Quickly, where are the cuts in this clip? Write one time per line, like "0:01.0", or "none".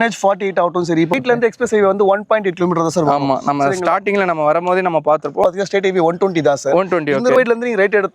0:01.2
0:05.4
0:07.3